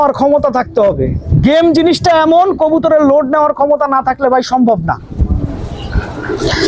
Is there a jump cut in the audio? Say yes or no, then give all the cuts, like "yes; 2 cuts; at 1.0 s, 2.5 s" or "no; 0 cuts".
no; 0 cuts